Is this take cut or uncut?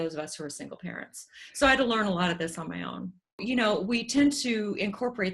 cut